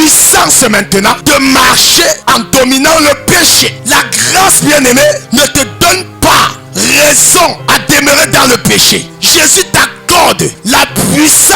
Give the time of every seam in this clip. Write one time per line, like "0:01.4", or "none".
0:01.2
0:02.2
0:03.7
0:05.2
0:06.6
0:07.6
0:09.1
0:10.6